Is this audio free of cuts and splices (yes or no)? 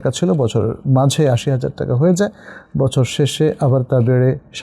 yes